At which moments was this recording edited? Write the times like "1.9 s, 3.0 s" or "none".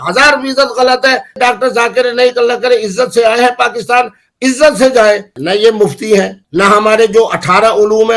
1.4 s, 5.3 s, 6.4 s